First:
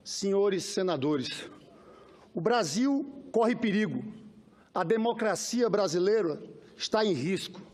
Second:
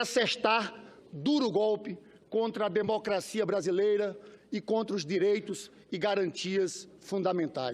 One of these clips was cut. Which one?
second; 1 cut; at 2.7 s

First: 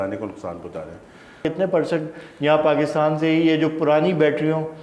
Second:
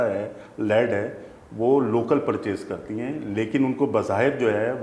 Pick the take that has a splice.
first; 1 cut; at 1.4 s

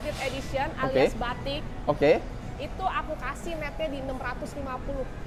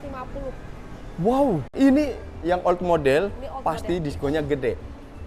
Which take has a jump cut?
second; 1 cut; at 1.7 s

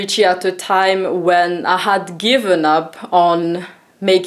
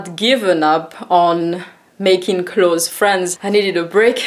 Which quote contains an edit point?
second; 1 cut; at 3.4 s

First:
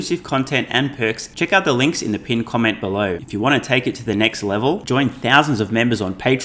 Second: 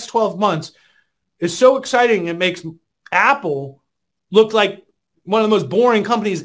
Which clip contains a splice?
first; 2 cuts; at 1.3 s, 3.2 s

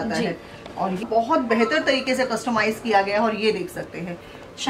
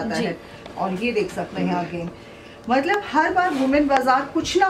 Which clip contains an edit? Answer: first; 1 cut; at 1.0 s

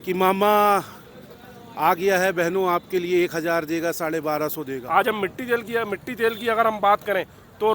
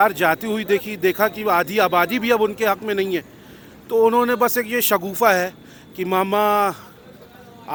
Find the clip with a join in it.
first; 1 cut; at 4.7 s

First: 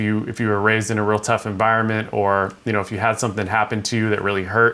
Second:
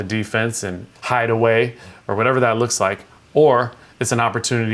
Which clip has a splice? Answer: second; 2 cuts; at 0.8 s, 1.9 s

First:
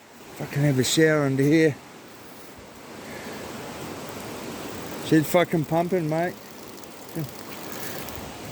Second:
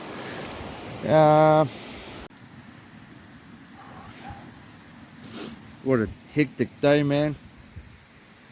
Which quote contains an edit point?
second; 1 cut; at 2.3 s

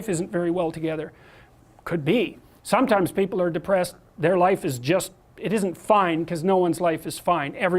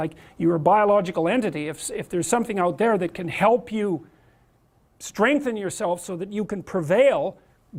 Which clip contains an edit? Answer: first; 1 cut; at 2.5 s

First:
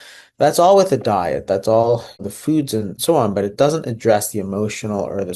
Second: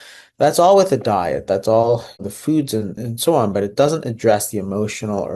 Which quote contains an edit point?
first; 1 cut; at 2.9 s

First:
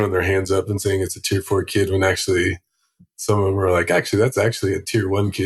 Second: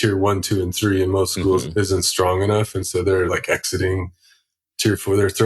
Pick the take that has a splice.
second; 2 cuts; at 1.6 s, 3.3 s

